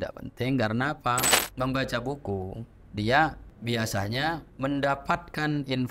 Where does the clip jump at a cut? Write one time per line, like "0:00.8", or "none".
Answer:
0:01.4
0:03.5
0:04.5